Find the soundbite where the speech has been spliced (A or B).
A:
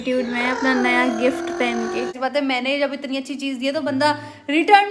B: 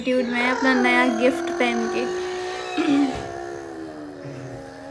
A